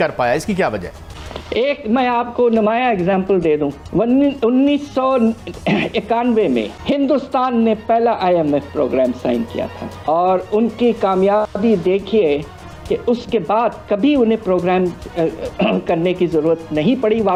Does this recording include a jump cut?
no; 0 cuts

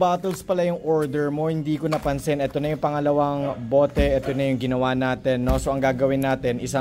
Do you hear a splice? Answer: no; 0 cuts

